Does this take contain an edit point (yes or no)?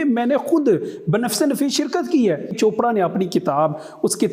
yes